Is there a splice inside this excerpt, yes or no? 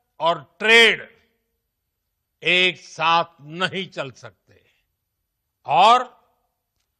no